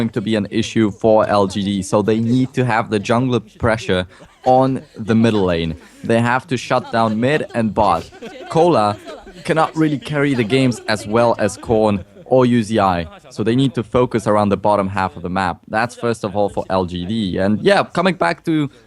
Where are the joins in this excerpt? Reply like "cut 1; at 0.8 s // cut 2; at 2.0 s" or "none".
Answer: cut 1; at 14.3 s